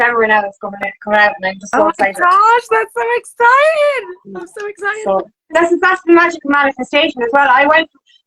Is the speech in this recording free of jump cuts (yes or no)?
yes